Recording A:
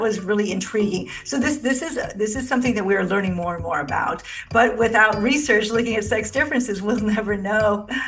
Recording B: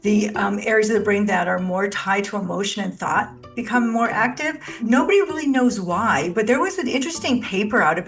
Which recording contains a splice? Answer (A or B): B